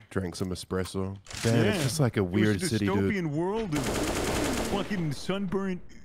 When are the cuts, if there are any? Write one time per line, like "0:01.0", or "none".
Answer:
0:01.2